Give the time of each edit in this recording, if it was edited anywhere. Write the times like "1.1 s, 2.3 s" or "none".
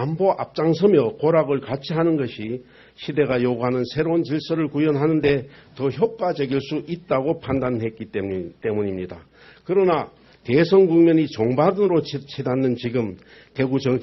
6.2 s